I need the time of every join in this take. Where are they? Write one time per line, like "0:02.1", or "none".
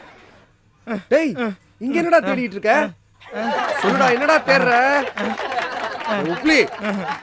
none